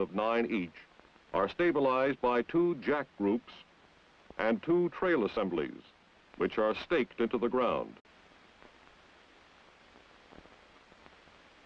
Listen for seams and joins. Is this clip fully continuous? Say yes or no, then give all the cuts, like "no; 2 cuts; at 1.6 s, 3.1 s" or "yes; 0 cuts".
yes; 0 cuts